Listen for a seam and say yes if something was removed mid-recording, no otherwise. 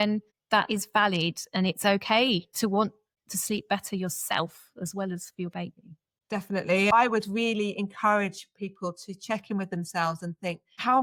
no